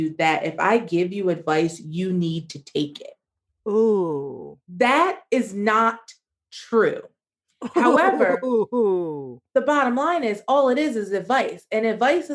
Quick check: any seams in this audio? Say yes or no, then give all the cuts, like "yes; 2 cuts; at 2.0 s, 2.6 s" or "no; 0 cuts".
yes; 1 cut; at 9.2 s